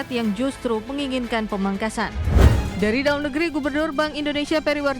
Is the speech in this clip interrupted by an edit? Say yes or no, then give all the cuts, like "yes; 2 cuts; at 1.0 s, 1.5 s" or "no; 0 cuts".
yes; 1 cut; at 2.3 s